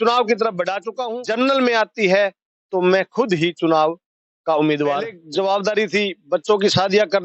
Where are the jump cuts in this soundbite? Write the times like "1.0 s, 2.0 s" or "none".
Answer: 0.9 s, 5.2 s